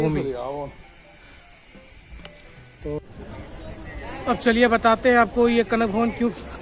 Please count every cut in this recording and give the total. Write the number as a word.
one